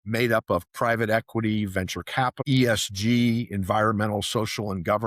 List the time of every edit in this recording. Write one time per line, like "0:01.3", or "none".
0:02.4